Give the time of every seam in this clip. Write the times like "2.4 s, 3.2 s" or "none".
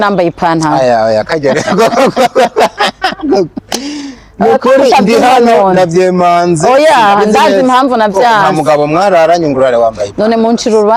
none